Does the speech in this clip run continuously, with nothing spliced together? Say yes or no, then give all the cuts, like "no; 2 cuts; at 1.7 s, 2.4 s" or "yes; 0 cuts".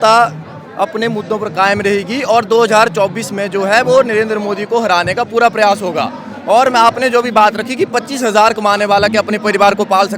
yes; 0 cuts